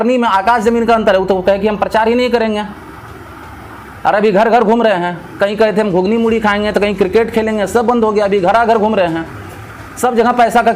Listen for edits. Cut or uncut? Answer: uncut